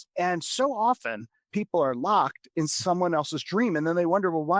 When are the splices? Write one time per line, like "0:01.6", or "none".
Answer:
none